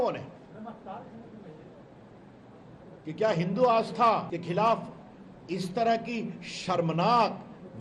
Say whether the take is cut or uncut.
cut